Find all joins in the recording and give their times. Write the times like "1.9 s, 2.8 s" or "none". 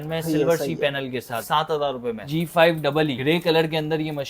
1.4 s, 2.3 s, 3.2 s